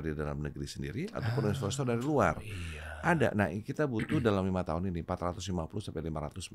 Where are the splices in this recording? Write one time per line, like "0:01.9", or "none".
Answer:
none